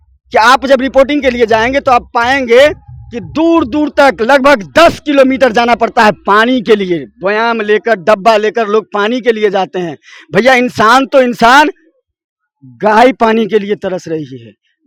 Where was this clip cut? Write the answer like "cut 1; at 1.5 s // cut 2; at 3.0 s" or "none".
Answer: none